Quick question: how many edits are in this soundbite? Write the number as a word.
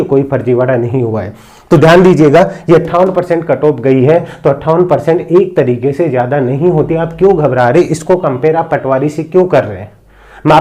zero